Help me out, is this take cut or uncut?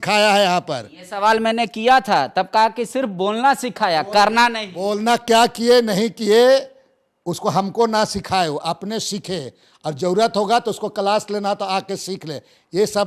uncut